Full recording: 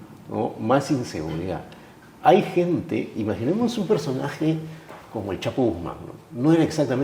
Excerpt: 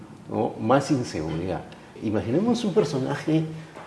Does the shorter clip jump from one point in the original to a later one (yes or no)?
yes